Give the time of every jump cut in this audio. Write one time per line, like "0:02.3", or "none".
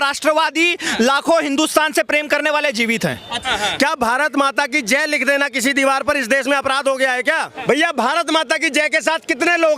0:03.3
0:07.5